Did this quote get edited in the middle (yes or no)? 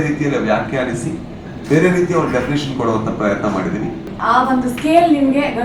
yes